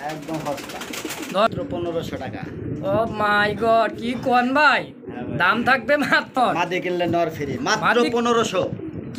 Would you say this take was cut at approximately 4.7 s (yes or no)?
no